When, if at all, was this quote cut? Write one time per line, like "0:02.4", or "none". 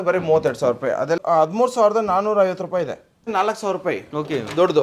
0:01.2
0:03.3